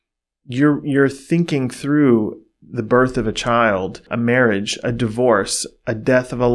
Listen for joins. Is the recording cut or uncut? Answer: uncut